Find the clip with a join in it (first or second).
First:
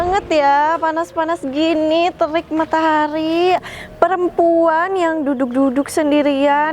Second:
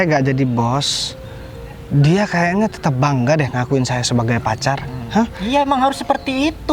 first